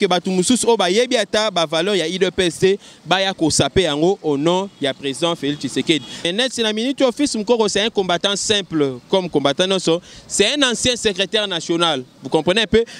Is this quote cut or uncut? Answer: cut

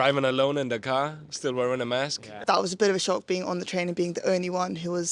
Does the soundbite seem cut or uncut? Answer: cut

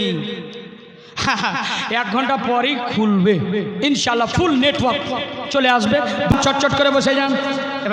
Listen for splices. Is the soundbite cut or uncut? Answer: cut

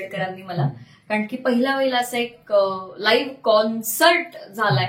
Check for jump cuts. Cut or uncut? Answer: uncut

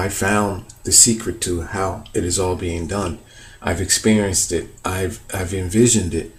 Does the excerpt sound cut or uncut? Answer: uncut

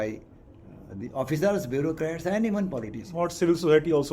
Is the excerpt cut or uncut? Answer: uncut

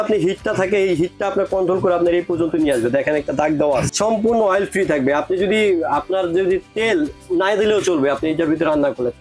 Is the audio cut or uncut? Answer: cut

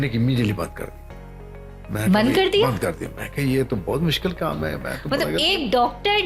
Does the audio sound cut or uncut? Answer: uncut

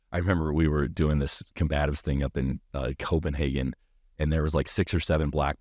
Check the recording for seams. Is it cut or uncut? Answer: uncut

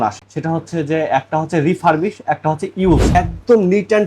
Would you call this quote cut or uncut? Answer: cut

